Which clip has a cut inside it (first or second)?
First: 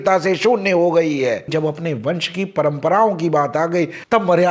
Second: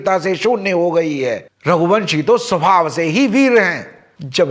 first